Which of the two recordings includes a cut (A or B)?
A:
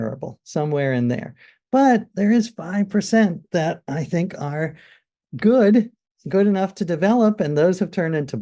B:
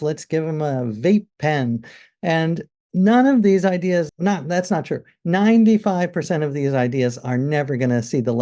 B